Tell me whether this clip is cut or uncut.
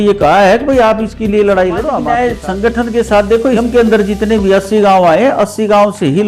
cut